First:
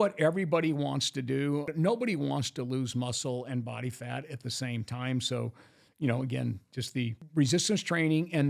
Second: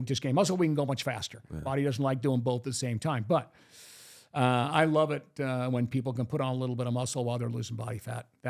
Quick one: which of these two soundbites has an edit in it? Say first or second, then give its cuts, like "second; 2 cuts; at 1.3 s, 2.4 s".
first; 2 cuts; at 1.7 s, 7.2 s